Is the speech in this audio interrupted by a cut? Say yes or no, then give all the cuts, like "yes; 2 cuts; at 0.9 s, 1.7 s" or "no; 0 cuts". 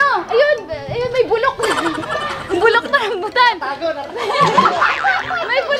no; 0 cuts